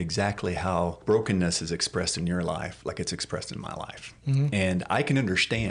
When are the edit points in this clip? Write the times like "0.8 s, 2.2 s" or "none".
1.0 s